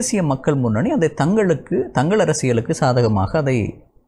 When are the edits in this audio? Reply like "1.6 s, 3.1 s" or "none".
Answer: none